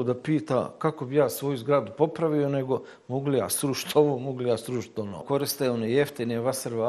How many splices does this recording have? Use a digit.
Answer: 1